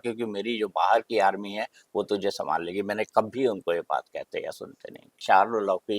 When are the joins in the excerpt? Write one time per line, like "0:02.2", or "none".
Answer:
0:05.1